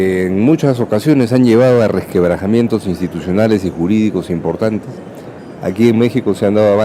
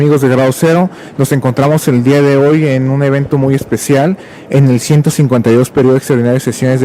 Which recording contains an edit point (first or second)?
first